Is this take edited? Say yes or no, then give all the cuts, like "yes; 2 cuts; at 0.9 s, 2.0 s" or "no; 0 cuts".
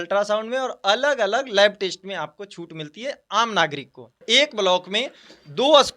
yes; 1 cut; at 4.2 s